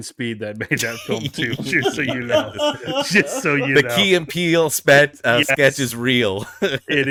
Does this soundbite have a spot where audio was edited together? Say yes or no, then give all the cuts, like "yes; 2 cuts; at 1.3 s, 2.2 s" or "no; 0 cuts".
no; 0 cuts